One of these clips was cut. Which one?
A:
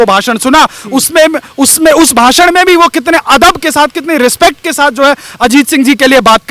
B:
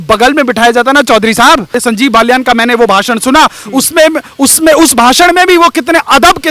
B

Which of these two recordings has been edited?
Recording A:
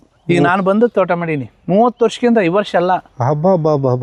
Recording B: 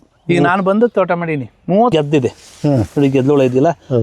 B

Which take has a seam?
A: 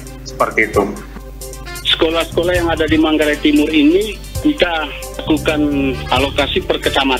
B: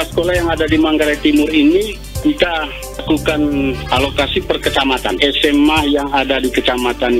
A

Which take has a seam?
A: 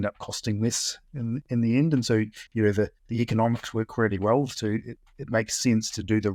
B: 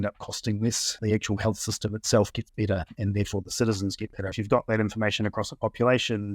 B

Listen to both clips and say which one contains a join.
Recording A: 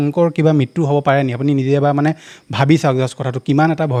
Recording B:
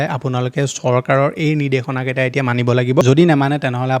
B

